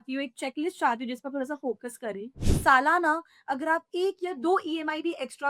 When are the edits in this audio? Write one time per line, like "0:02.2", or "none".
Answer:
0:02.4